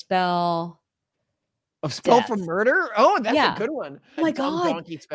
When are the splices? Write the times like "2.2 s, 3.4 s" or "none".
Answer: 4.2 s